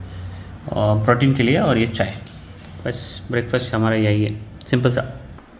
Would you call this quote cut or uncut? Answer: uncut